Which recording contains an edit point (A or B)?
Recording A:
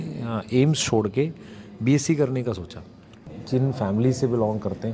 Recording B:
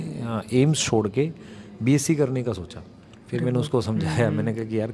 A